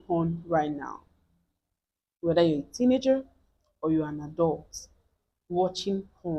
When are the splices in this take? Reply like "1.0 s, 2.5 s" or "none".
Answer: none